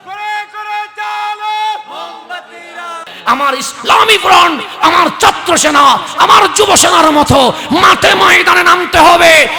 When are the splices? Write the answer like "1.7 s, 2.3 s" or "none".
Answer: 3.1 s

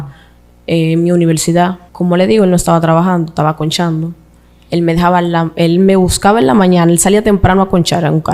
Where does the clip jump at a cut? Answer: 1.8 s

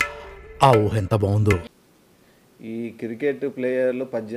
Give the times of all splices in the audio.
1.7 s

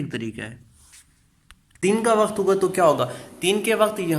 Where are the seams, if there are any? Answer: 1.8 s

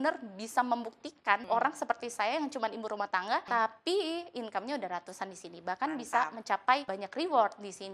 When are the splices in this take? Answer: 1.4 s, 3.4 s, 7.0 s

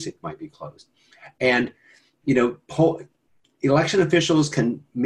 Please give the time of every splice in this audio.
none

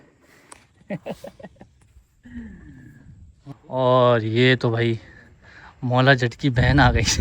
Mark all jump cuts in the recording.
3.4 s

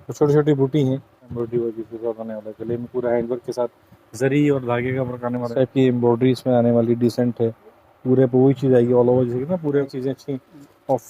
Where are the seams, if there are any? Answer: 1.3 s, 5.5 s, 9.9 s

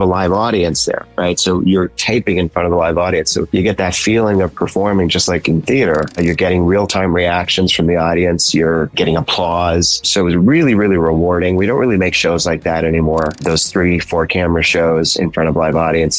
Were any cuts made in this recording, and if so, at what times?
3.5 s, 6.2 s, 8.9 s, 10.1 s, 13.4 s

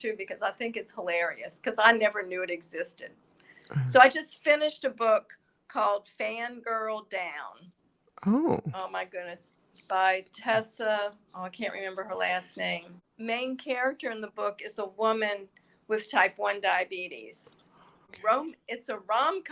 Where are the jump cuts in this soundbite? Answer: 13.0 s, 18.2 s

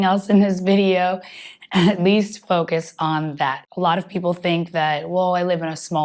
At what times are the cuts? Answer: 3.6 s

